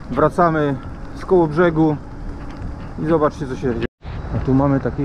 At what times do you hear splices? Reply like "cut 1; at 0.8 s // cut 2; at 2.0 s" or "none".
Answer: cut 1; at 3.8 s

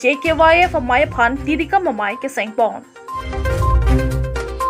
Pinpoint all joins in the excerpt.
none

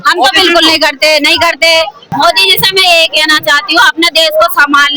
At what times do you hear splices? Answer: cut 1; at 2.1 s

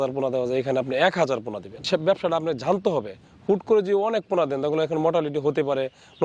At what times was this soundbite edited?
cut 1; at 1.8 s

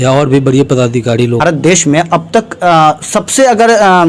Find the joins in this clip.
cut 1; at 1.4 s

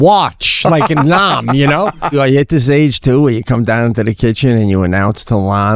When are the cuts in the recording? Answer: cut 1; at 2.1 s

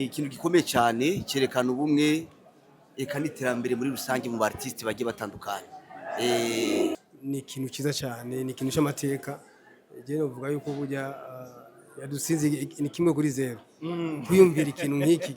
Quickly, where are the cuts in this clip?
cut 1; at 7.0 s

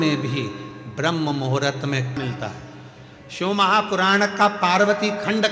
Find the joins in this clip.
cut 1; at 2.2 s

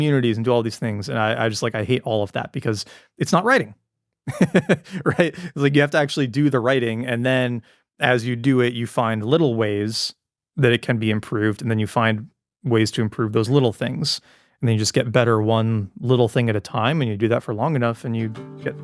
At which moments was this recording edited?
none

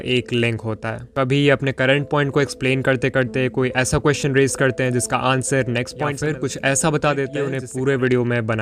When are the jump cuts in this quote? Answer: cut 1; at 6.1 s // cut 2; at 7.6 s

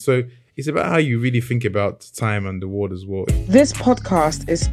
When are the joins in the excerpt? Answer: cut 1; at 3.3 s

